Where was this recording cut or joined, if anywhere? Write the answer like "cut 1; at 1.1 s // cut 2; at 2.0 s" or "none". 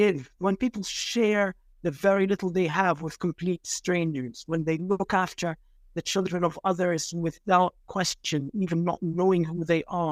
none